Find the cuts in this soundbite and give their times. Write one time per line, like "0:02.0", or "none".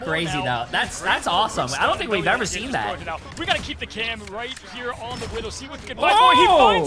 0:03.3